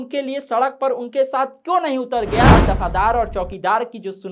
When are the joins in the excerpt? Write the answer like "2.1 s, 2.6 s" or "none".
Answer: 2.5 s